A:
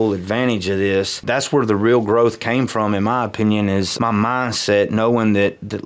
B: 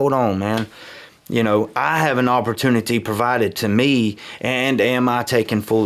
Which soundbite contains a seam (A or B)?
A